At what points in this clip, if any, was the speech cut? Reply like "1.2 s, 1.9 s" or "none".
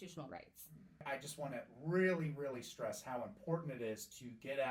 1.0 s